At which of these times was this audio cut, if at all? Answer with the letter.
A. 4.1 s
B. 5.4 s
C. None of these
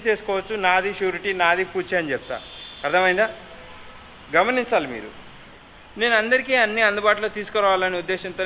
B